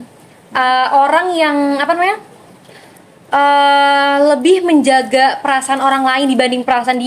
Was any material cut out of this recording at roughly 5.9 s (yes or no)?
no